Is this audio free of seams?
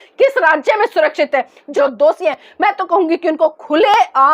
no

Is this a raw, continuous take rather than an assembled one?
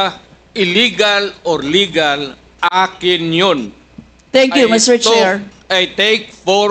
yes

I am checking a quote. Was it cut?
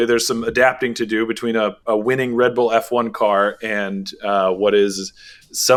no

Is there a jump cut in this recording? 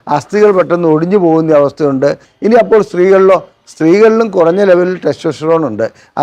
yes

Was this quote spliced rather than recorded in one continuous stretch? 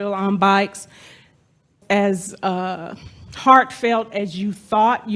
yes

